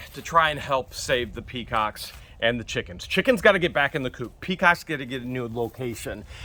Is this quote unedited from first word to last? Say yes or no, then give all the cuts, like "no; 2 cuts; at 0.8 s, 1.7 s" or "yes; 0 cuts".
yes; 0 cuts